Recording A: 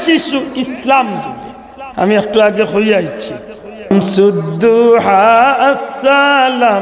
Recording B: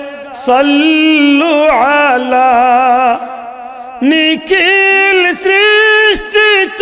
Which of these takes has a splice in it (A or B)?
A